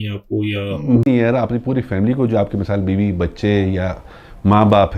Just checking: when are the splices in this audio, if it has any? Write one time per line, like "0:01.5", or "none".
0:01.1